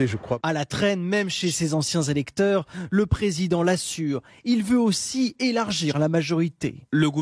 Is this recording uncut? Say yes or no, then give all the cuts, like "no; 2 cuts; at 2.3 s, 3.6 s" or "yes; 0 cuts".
no; 1 cut; at 1.6 s